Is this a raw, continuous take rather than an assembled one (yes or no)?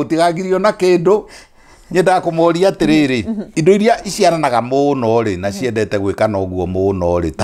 no